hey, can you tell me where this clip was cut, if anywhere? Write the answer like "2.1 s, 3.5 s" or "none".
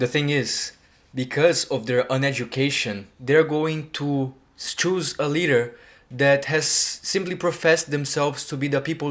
none